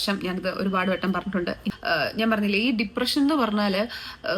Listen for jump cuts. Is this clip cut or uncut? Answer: cut